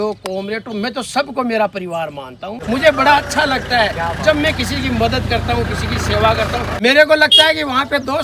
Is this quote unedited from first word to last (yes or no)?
no